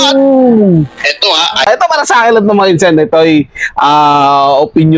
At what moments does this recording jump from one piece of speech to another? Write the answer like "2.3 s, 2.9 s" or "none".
1.7 s